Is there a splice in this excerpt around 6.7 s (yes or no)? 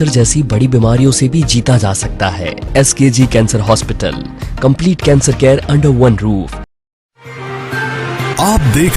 yes